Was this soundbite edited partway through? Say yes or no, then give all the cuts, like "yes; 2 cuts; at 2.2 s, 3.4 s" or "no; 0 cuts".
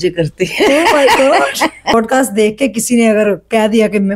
yes; 1 cut; at 1.9 s